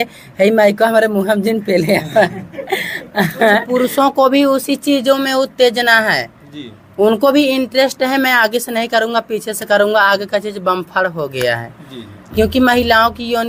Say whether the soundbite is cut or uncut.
cut